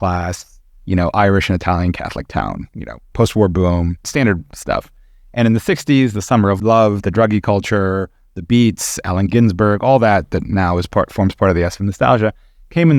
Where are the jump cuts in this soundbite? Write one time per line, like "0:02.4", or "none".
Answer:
0:04.1
0:06.6

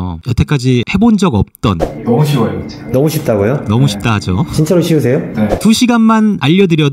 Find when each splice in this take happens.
0:01.9
0:05.5

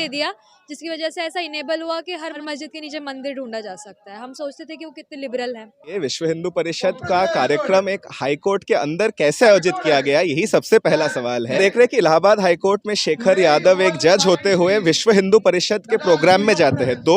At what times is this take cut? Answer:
0:02.4
0:05.9
0:11.6

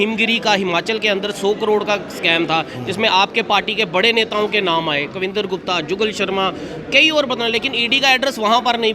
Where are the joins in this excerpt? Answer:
none

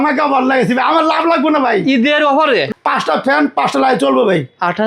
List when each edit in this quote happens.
0:02.7

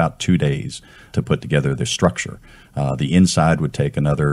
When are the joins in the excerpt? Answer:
0:01.1

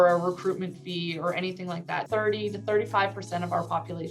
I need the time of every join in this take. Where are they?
0:02.1

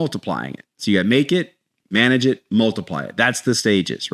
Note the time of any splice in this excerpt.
none

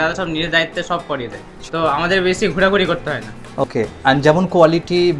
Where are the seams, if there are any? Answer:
0:01.5
0:03.6

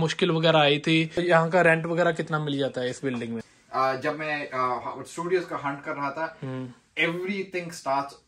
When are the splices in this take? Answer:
0:01.2
0:03.4

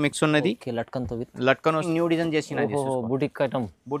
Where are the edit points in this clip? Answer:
0:01.8

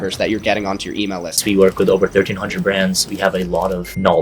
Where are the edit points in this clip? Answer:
0:01.3

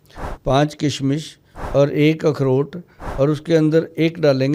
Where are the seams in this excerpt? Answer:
none

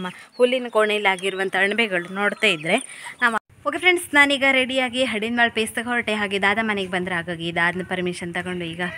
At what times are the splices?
0:03.4

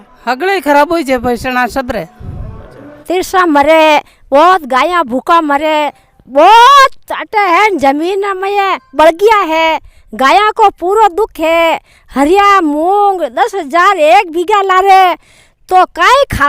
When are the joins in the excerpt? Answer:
0:02.9

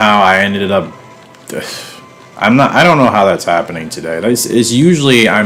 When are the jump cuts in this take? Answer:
none

